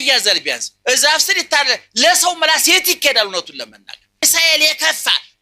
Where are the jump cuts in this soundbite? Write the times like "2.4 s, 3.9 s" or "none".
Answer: 4.2 s